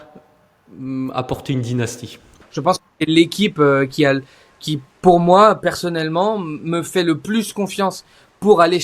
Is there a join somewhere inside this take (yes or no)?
yes